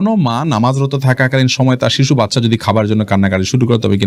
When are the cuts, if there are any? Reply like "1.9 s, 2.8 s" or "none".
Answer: none